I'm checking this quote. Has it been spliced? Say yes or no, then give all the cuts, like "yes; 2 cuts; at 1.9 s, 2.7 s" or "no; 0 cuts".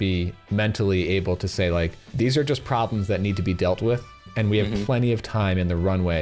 no; 0 cuts